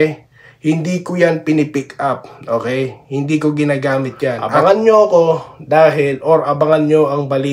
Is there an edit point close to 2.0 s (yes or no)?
no